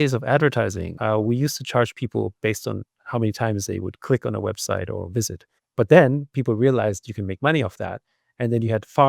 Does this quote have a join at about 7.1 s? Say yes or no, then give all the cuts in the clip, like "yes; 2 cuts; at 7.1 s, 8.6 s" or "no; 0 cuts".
no; 1 cut; at 0.9 s